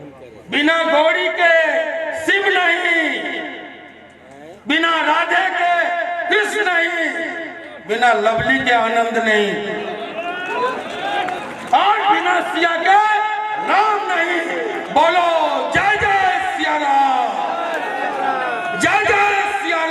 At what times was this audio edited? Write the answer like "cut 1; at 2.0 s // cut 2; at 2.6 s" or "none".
none

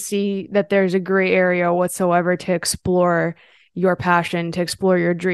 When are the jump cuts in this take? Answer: none

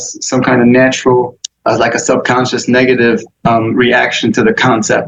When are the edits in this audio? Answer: cut 1; at 1.4 s // cut 2; at 3.3 s

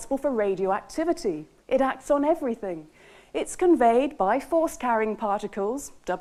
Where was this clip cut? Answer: none

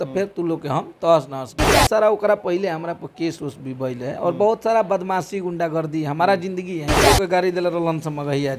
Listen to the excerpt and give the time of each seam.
cut 1; at 1.8 s // cut 2; at 6.9 s

